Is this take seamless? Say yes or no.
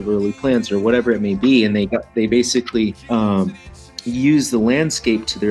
no